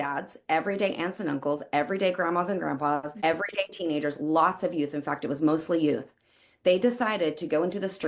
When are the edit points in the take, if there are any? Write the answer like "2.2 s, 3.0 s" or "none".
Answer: 3.1 s